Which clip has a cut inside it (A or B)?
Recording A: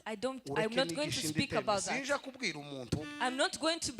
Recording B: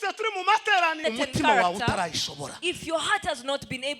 B